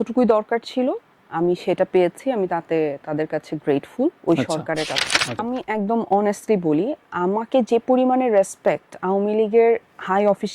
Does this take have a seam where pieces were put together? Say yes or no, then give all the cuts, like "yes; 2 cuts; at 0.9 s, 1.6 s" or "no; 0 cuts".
yes; 1 cut; at 5.4 s